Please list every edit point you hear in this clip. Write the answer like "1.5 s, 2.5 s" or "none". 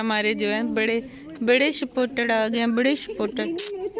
none